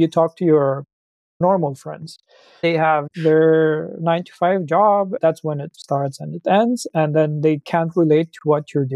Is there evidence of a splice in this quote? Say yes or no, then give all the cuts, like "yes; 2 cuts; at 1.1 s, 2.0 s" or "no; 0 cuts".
yes; 3 cuts; at 1.4 s, 2.6 s, 5.2 s